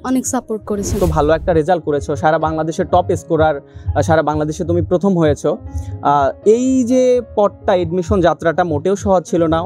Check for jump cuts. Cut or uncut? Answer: cut